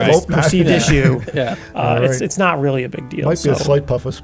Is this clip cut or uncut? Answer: uncut